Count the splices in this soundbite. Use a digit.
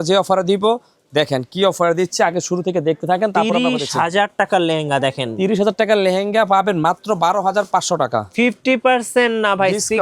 0